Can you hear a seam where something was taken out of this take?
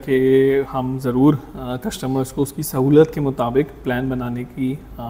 no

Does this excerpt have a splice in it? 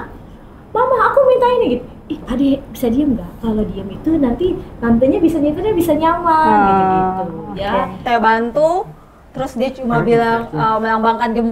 yes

